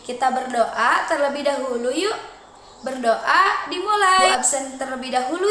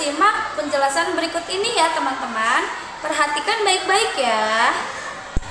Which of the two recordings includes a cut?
first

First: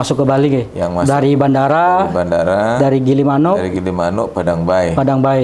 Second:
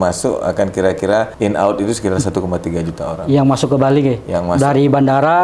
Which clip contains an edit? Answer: second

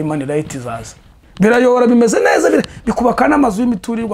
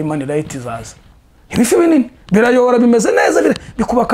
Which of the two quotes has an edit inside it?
first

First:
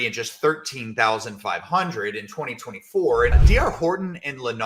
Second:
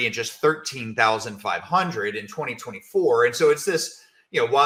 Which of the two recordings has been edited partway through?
first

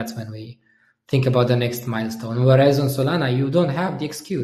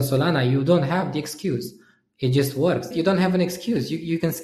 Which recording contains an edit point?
second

